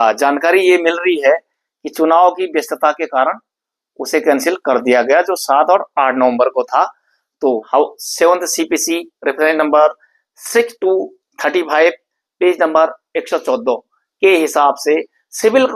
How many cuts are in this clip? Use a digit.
1